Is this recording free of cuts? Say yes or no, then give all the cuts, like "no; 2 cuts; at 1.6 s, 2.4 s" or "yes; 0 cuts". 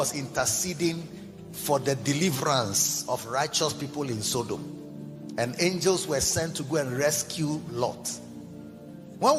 yes; 0 cuts